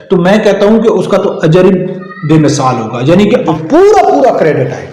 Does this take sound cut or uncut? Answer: cut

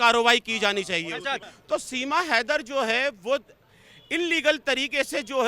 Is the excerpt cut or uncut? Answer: cut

